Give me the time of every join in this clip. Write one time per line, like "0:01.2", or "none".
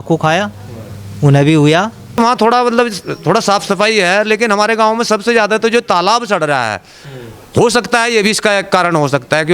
0:02.2

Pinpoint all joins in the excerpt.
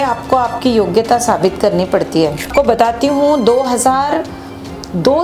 0:02.5

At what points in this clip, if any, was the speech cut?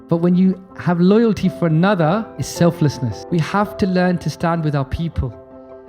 0:02.4
0:03.2

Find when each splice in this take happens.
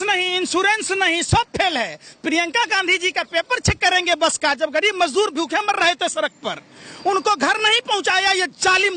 none

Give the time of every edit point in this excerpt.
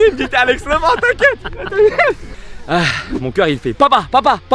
0:02.3

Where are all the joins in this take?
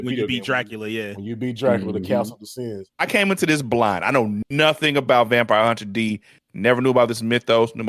0:03.0

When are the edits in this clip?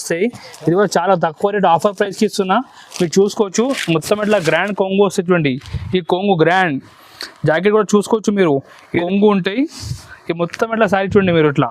0:09.0

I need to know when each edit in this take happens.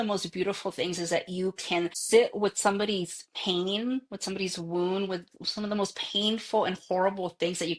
0:02.0

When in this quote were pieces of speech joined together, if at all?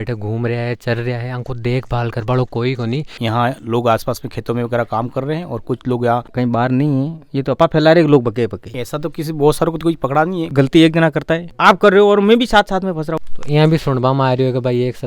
0:03.2
0:06.3
0:08.8
0:10.5
0:11.5
0:13.2

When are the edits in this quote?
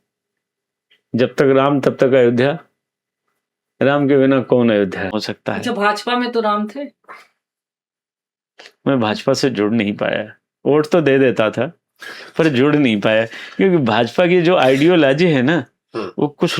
0:05.1

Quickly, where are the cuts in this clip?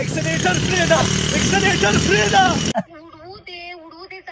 0:02.7

